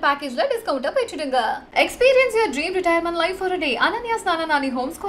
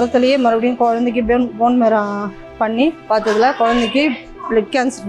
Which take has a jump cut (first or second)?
second